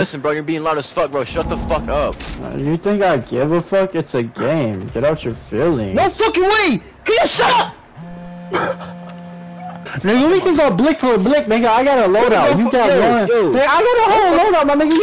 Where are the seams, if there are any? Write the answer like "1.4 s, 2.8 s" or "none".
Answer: 9.7 s